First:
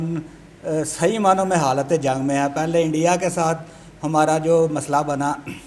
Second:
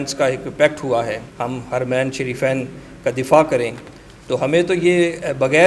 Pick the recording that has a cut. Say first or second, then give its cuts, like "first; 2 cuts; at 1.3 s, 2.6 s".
second; 1 cut; at 1.3 s